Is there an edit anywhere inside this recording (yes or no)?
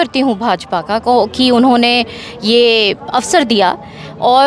no